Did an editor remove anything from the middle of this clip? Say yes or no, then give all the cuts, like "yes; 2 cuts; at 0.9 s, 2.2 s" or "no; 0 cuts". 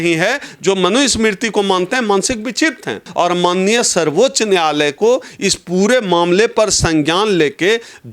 yes; 1 cut; at 3.0 s